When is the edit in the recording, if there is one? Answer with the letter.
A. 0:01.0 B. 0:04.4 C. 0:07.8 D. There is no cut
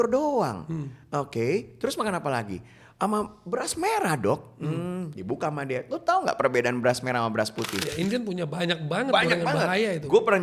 C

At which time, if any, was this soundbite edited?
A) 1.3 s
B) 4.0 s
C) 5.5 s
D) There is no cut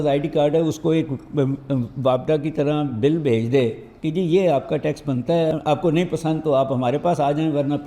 C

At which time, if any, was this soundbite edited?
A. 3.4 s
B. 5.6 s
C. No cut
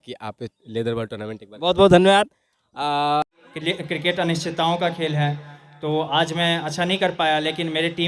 A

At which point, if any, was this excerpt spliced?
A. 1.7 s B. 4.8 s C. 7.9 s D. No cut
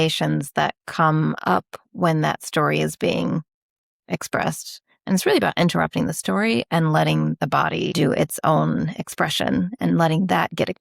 C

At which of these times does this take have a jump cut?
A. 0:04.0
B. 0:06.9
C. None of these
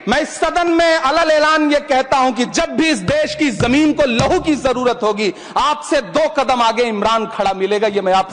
C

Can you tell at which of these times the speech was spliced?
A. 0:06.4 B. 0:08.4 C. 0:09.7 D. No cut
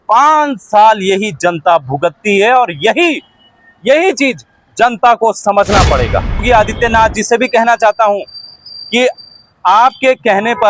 A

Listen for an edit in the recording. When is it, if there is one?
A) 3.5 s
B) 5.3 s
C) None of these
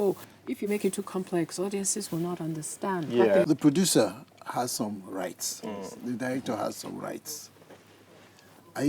A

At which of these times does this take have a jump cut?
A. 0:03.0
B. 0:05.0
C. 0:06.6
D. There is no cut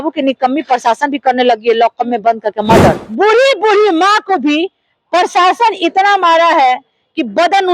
A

